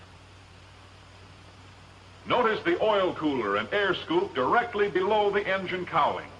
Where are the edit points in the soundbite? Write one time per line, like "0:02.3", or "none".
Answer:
0:02.3